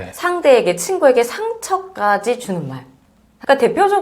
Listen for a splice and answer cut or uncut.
uncut